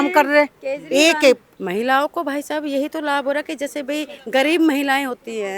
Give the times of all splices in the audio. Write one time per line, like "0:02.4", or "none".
0:01.5